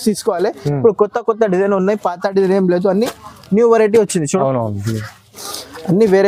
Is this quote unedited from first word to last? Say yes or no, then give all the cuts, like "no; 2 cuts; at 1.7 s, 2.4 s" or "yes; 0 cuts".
yes; 0 cuts